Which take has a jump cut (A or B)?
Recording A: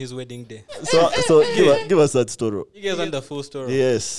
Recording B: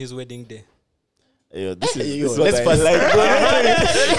A